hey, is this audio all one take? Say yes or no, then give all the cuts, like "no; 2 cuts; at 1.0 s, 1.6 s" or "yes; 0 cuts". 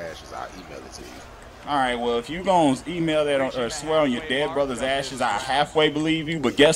yes; 0 cuts